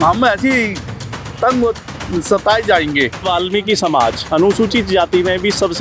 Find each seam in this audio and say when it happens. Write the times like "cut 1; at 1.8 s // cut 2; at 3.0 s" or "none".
cut 1; at 3.2 s